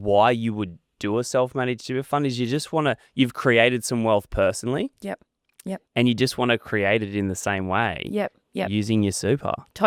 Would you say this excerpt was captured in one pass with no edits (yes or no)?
yes